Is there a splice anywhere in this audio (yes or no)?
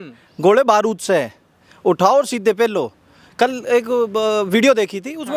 yes